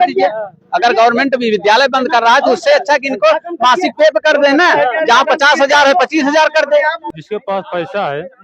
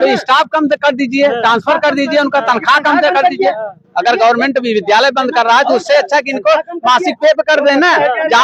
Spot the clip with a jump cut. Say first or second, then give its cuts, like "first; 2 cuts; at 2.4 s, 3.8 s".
first; 1 cut; at 7.0 s